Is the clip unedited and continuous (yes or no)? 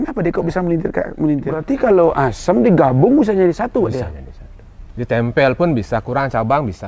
no